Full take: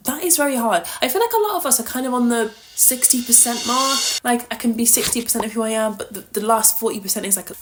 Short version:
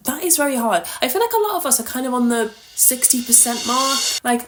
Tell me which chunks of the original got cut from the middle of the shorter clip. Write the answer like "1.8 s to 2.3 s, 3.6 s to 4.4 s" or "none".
none